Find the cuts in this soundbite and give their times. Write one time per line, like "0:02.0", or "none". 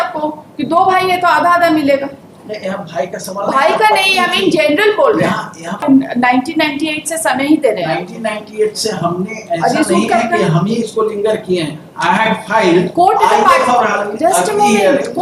0:05.8